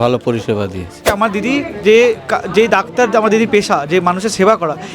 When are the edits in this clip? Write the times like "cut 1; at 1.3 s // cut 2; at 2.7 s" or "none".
cut 1; at 1.1 s